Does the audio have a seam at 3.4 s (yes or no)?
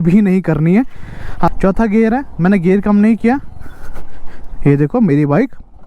no